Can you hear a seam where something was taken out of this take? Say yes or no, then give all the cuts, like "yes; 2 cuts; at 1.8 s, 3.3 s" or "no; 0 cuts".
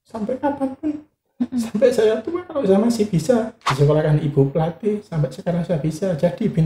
yes; 1 cut; at 3.6 s